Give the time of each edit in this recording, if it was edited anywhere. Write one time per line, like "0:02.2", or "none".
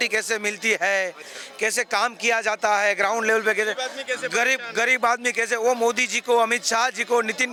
none